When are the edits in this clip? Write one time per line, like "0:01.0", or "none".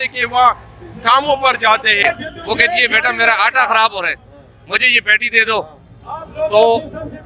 0:02.0